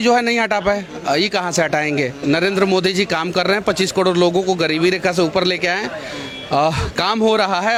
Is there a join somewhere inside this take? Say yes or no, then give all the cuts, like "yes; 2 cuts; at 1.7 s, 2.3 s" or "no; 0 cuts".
no; 0 cuts